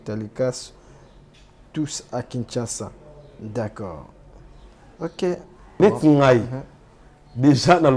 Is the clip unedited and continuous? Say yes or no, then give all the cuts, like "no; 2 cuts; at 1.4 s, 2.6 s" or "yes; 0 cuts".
no; 1 cut; at 5.8 s